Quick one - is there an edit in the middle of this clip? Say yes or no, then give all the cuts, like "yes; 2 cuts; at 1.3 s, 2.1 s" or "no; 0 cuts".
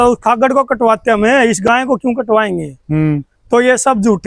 no; 0 cuts